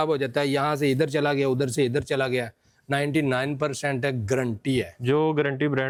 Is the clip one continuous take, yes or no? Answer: yes